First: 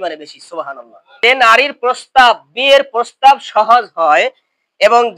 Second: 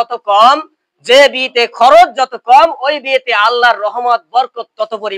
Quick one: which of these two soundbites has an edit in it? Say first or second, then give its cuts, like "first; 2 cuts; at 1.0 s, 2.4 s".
first; 1 cut; at 1.0 s